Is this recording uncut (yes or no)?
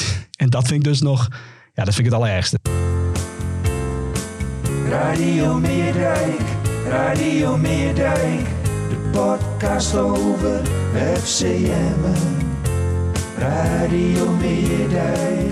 no